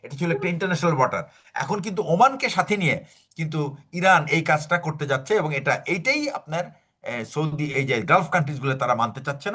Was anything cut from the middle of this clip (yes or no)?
no